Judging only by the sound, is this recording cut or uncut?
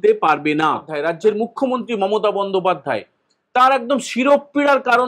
cut